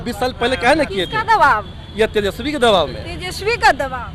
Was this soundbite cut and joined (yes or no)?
no